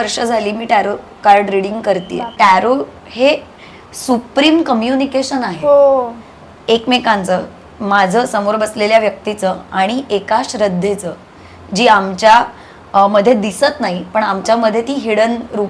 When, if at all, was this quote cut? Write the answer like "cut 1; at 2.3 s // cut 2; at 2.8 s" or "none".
cut 1; at 2.3 s